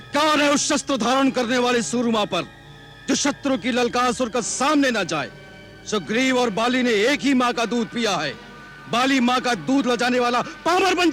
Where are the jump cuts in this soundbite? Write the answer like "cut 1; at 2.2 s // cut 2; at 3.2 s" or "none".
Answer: none